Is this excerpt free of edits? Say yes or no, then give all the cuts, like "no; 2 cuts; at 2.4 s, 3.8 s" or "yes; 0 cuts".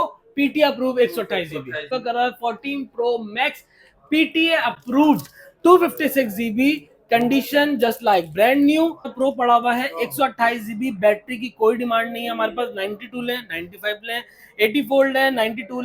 no; 2 cuts; at 1.9 s, 9.1 s